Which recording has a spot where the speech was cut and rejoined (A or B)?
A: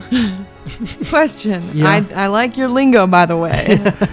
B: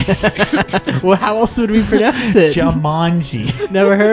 B